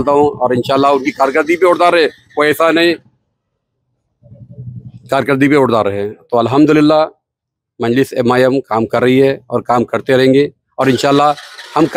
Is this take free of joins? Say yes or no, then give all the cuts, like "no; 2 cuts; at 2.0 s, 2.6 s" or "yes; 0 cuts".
yes; 0 cuts